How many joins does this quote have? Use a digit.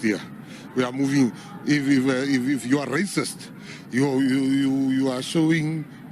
1